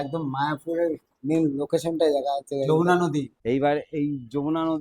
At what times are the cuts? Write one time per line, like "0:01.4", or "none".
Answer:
0:03.3